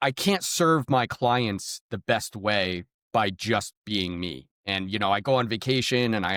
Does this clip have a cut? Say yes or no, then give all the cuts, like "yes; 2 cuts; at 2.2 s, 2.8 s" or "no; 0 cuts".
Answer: no; 0 cuts